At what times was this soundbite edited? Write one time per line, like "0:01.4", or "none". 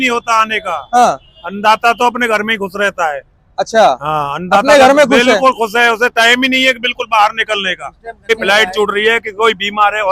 0:08.2